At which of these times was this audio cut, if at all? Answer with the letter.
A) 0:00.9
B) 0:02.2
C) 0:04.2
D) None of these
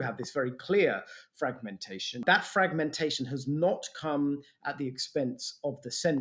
B